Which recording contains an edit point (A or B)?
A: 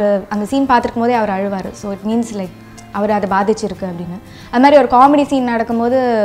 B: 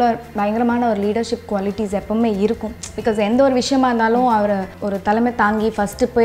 B